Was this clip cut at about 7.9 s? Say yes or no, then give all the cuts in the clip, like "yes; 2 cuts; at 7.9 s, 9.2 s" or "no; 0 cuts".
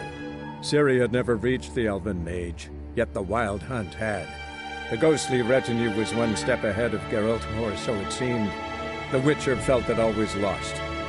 no; 0 cuts